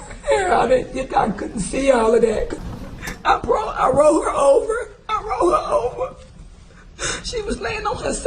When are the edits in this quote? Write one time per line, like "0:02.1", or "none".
0:02.6